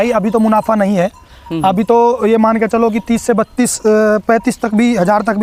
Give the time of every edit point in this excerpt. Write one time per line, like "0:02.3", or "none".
none